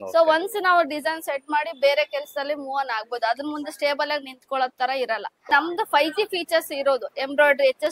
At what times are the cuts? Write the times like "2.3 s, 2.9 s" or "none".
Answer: 5.5 s